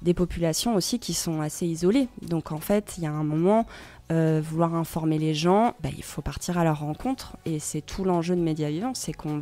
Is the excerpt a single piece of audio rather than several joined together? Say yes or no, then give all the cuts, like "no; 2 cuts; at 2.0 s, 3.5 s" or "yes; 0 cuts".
no; 1 cut; at 5.8 s